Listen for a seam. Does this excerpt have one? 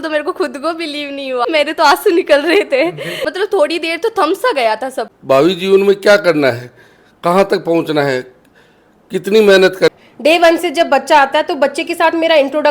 yes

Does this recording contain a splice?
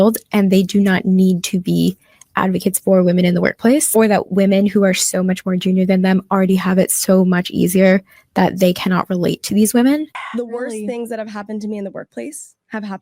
yes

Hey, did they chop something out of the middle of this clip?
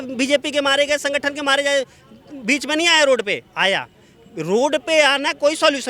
no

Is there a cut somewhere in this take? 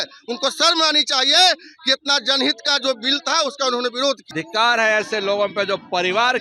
yes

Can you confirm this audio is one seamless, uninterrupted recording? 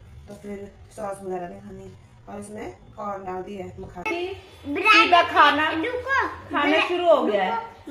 no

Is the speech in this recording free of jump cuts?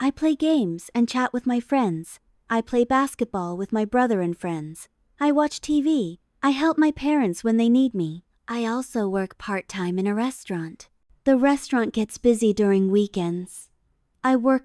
no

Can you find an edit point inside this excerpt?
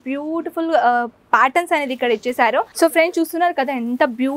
yes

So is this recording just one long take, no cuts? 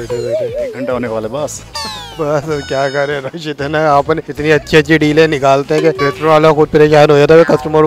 no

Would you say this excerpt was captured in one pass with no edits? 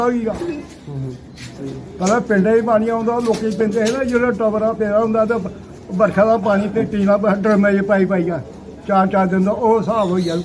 yes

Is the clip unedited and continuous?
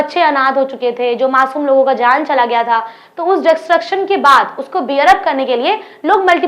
yes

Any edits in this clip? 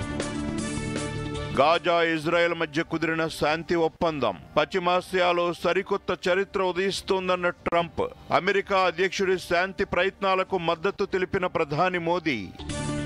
no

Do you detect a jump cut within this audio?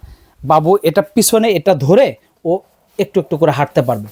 no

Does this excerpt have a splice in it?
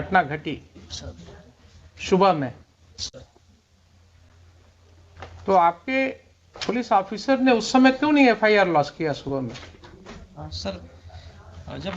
yes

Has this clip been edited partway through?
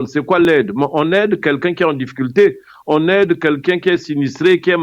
no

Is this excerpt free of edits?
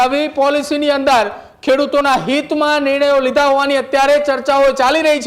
yes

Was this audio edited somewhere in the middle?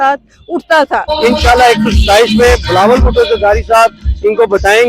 yes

